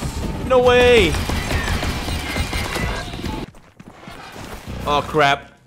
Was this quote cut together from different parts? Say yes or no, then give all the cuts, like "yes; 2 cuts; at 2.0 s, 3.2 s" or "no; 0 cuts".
yes; 1 cut; at 3.5 s